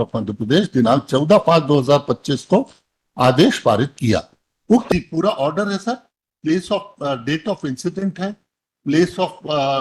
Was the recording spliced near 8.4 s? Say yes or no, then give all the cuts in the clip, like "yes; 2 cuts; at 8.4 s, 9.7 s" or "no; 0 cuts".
no; 1 cut; at 4.9 s